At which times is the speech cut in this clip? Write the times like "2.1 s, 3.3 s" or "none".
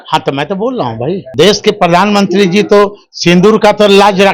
1.3 s